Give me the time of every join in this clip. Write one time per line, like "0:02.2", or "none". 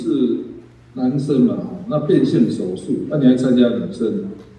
none